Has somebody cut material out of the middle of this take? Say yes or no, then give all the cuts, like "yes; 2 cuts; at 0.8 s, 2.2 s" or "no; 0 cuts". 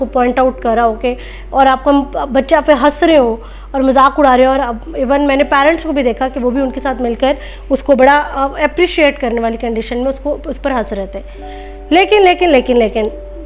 no; 0 cuts